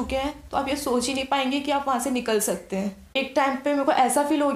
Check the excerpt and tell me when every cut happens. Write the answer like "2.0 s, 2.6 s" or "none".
3.0 s